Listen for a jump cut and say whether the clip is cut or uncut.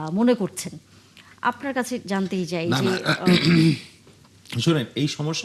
uncut